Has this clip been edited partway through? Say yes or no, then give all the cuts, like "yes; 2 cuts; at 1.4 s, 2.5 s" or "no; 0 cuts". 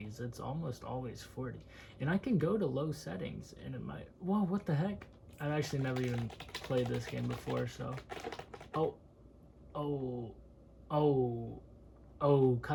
no; 0 cuts